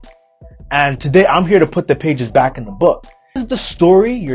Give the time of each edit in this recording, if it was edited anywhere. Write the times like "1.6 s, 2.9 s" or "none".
3.4 s

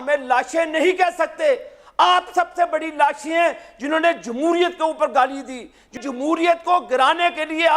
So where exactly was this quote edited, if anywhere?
6.0 s

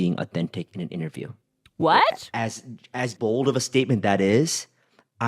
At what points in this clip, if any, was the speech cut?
3.1 s

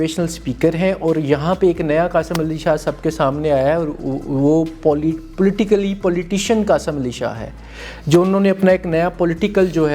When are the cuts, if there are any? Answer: none

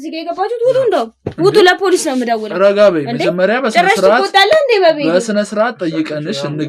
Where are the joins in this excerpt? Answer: none

